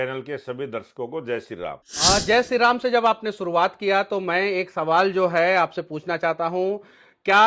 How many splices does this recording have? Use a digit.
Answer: 1